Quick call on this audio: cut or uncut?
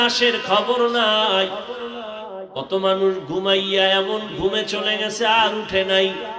uncut